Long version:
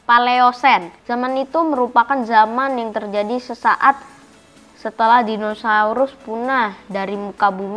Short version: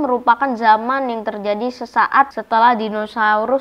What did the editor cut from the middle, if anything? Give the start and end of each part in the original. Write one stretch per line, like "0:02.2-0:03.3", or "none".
0:04.1-0:04.9